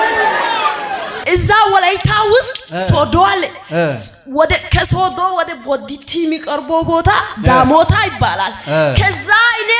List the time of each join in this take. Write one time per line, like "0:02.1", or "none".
0:01.1